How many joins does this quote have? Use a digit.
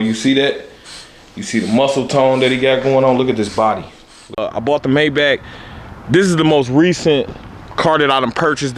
1